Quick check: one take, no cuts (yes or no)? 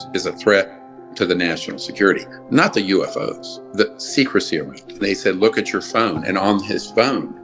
no